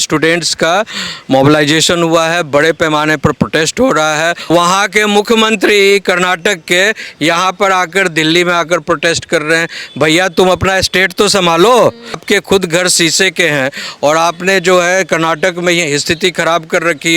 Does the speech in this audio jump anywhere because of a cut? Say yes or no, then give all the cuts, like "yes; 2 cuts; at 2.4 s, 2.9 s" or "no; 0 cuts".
yes; 2 cuts; at 4.4 s, 12.2 s